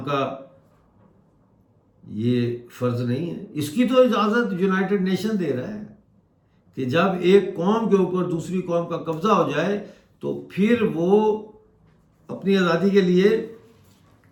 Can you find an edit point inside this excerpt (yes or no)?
no